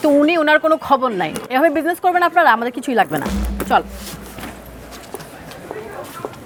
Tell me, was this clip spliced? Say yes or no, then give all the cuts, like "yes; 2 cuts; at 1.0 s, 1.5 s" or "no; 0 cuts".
no; 0 cuts